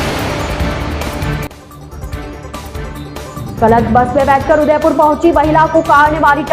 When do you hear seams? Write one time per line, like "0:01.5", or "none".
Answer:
0:03.1